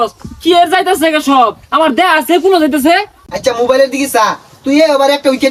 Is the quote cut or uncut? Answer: uncut